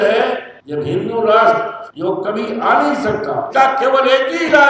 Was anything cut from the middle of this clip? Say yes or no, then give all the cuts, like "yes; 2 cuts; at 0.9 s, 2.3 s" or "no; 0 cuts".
yes; 1 cut; at 3.5 s